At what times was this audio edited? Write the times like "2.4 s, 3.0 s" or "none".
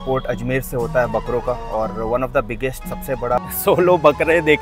3.4 s

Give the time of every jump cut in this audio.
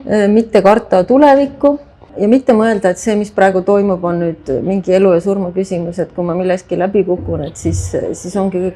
2.1 s

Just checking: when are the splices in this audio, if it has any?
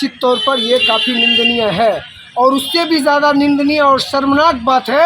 none

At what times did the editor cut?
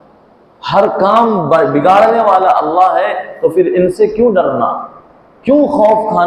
none

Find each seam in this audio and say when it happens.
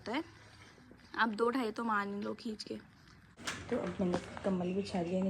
3.3 s

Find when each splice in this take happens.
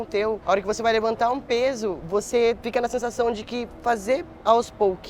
none

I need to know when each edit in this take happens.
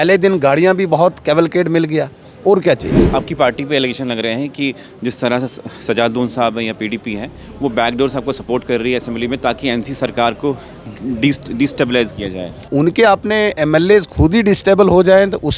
3.0 s, 12.7 s

